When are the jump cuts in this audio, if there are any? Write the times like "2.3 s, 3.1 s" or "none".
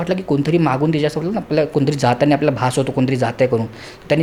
none